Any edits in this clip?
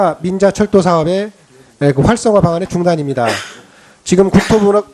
yes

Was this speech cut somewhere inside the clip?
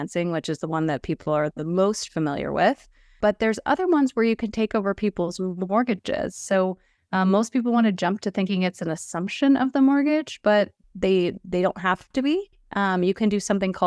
yes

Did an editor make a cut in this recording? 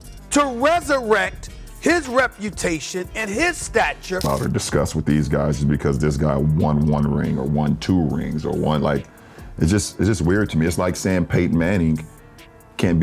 yes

